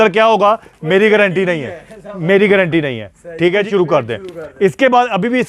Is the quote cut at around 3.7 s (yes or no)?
yes